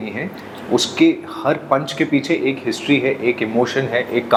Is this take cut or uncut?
uncut